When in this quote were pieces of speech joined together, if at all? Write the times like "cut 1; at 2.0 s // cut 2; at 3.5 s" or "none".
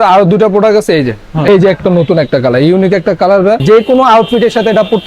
cut 1; at 1.5 s // cut 2; at 3.6 s